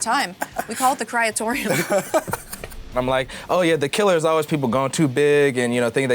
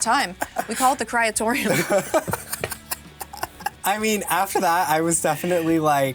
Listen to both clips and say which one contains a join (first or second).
first